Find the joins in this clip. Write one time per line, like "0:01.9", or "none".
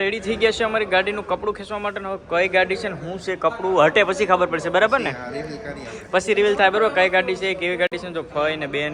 none